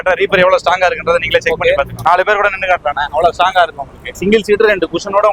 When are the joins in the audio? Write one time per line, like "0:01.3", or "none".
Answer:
0:02.0
0:04.2

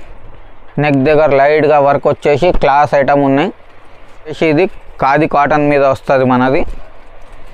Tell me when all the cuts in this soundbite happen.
0:04.3

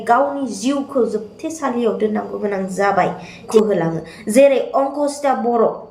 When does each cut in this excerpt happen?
0:03.5

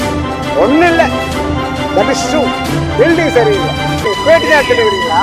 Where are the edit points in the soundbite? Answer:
0:04.0

